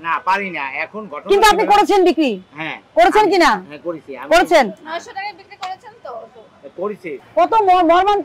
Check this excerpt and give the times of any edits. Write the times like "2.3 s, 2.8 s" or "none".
7.1 s